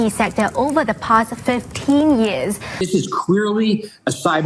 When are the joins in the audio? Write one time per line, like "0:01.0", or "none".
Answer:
0:02.8

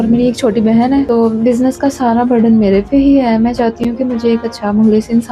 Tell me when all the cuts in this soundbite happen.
0:01.1

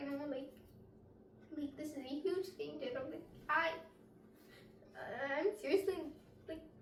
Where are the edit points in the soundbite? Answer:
none

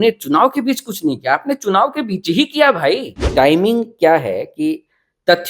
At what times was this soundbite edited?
0:03.2

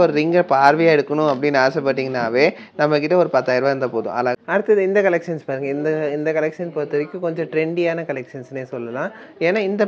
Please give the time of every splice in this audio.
0:04.3

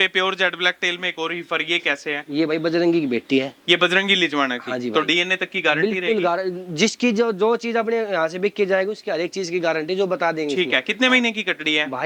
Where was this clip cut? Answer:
none

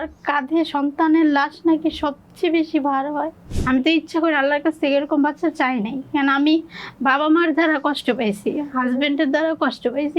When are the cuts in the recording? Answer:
0:03.4

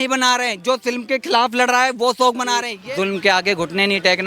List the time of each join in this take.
0:02.7

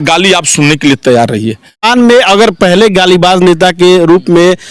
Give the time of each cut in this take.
0:01.9

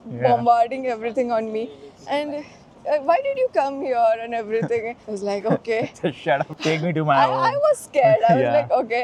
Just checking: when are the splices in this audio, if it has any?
none

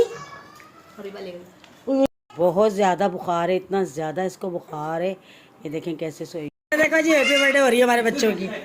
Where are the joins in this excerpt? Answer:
0:02.1
0:06.5

